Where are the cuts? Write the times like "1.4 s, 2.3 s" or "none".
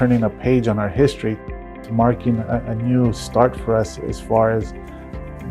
1.4 s